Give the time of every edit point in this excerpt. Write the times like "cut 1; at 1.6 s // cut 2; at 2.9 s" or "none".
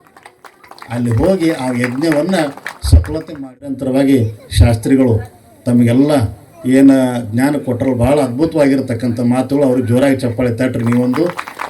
cut 1; at 3.8 s